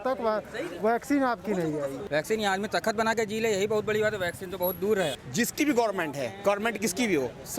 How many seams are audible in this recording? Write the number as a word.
two